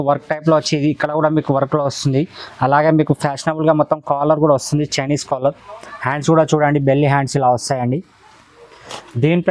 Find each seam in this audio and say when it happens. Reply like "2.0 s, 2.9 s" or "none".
none